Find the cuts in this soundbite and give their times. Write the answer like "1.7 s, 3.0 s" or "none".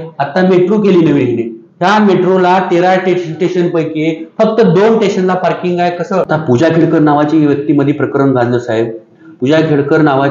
6.3 s